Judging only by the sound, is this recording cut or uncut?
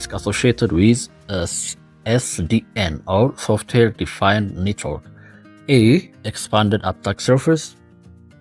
uncut